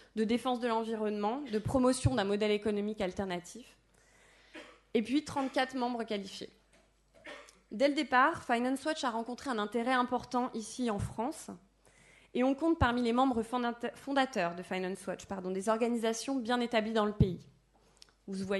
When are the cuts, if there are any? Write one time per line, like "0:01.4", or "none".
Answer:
0:08.9